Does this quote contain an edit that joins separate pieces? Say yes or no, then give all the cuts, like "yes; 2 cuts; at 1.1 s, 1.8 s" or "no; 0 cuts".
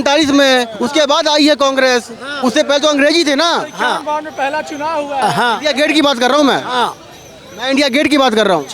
no; 0 cuts